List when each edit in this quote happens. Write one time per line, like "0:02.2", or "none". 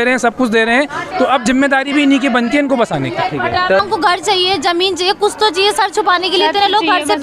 0:03.8